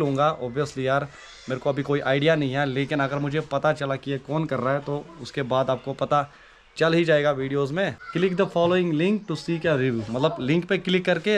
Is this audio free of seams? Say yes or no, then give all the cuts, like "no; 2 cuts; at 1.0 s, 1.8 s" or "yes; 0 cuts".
no; 1 cut; at 8.0 s